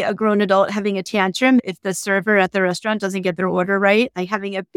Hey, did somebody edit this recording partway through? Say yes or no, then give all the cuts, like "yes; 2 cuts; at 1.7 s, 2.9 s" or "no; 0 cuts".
yes; 1 cut; at 1.6 s